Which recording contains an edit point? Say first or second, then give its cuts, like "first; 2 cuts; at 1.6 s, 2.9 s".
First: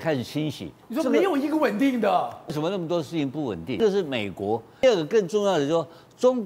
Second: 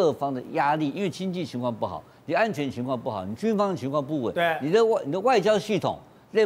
first; 4 cuts; at 0.8 s, 2.5 s, 3.8 s, 4.8 s